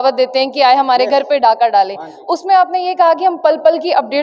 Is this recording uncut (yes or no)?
yes